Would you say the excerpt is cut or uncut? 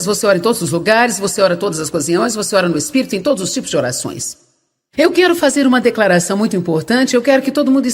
cut